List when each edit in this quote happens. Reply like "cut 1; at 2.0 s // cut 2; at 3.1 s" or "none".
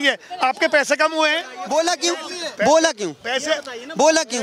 cut 1; at 1.5 s

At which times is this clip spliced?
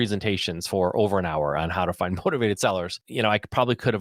cut 1; at 3.0 s

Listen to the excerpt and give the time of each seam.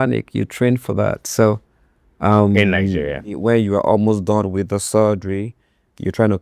cut 1; at 3.3 s

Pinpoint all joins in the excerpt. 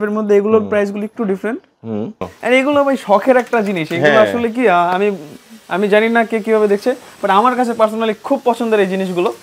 cut 1; at 2.3 s

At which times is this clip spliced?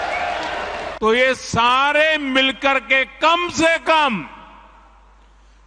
cut 1; at 0.9 s

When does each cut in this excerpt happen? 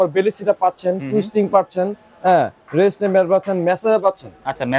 none

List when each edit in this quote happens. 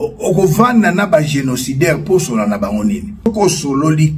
cut 1; at 3.3 s

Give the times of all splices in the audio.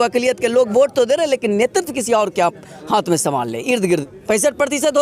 cut 1; at 4.1 s

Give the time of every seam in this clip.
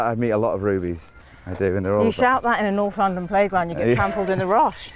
cut 1; at 1.2 s

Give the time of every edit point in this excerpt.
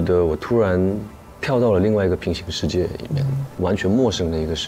cut 1; at 3.6 s

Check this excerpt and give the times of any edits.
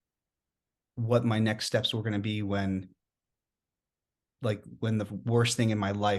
none

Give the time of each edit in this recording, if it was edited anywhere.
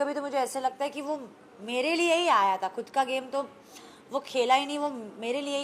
none

